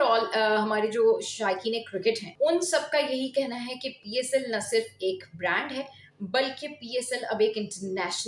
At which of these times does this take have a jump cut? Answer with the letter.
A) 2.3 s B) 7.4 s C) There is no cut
A